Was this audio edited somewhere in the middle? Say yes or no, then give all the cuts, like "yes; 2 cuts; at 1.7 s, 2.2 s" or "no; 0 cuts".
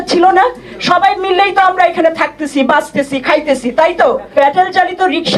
yes; 1 cut; at 4.3 s